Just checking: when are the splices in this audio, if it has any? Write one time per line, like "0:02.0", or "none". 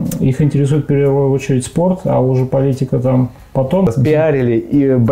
0:03.9